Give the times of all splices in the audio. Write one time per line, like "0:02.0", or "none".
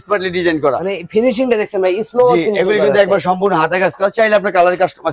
none